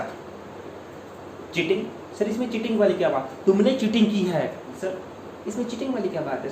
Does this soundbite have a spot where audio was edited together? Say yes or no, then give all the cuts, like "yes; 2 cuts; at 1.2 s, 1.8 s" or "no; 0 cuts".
yes; 1 cut; at 4.7 s